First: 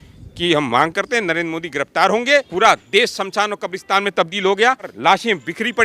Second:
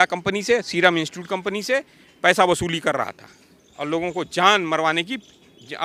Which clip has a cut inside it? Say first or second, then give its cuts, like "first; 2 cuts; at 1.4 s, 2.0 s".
first; 2 cuts; at 2.5 s, 4.9 s